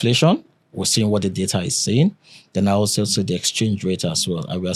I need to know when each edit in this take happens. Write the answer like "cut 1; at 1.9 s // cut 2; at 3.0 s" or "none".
none